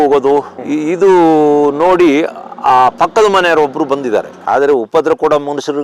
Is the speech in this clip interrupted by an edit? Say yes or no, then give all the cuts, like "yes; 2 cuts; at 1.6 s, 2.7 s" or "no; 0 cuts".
yes; 1 cut; at 4.3 s